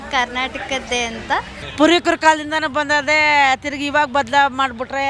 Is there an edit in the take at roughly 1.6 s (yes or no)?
yes